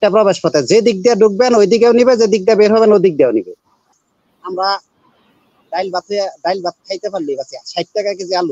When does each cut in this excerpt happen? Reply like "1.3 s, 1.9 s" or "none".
3.9 s